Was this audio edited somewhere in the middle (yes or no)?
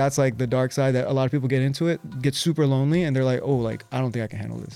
no